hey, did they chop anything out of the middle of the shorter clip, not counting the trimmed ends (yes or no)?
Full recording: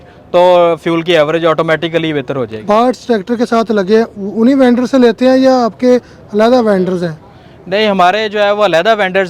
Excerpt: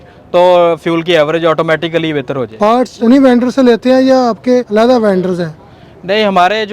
yes